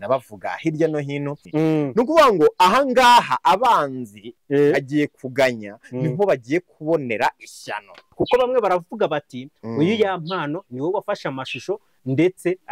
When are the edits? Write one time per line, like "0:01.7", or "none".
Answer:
0:01.4
0:08.0